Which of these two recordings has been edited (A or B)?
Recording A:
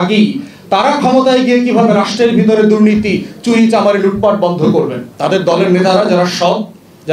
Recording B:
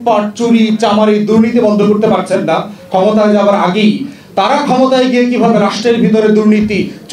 A